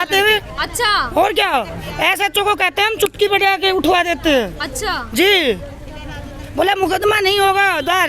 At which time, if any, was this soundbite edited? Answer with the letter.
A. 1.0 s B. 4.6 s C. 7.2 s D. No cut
D